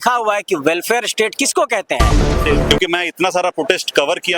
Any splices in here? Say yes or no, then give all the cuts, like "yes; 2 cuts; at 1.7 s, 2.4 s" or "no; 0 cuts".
yes; 1 cut; at 2.4 s